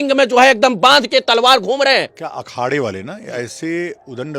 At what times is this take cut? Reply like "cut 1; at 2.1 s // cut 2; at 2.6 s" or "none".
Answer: cut 1; at 2.1 s